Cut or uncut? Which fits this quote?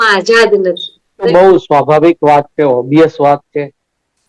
cut